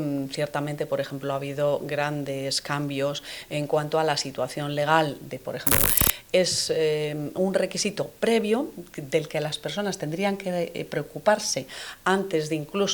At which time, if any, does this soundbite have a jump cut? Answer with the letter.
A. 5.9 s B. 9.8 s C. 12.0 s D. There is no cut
A